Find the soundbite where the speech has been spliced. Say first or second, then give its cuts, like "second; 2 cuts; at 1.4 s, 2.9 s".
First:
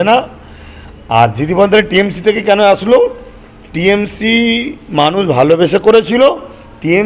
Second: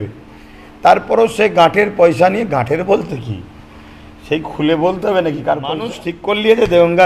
second; 1 cut; at 6.1 s